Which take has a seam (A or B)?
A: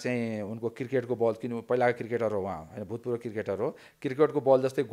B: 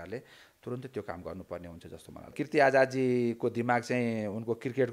B